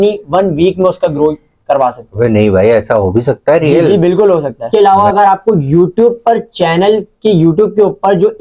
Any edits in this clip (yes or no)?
yes